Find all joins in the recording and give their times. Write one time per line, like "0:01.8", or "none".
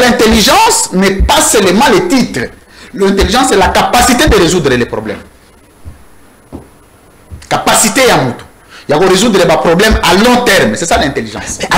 none